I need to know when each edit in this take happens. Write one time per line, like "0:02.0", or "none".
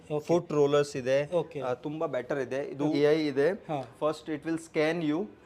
0:02.9
0:03.9